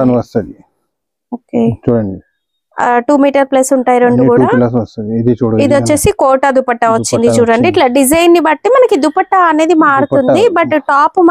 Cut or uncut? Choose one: uncut